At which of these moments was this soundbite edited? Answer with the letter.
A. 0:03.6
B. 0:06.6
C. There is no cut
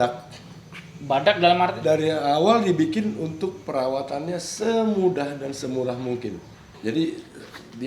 B